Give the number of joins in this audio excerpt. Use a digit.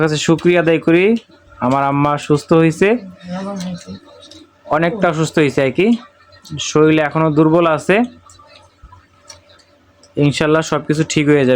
0